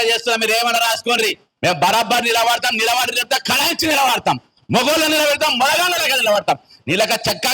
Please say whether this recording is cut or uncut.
cut